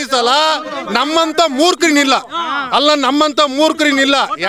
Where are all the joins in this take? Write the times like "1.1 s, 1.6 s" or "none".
none